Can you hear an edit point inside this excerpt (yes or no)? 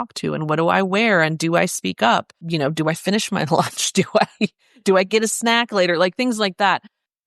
yes